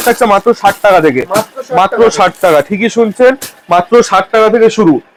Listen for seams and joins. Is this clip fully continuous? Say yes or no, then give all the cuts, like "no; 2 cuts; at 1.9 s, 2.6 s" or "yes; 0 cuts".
yes; 0 cuts